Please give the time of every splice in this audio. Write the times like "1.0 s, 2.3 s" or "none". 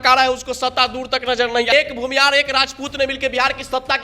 1.7 s